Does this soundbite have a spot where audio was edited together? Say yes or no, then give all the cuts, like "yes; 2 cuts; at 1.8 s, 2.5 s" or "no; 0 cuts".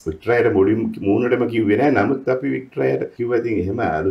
yes; 1 cut; at 3.1 s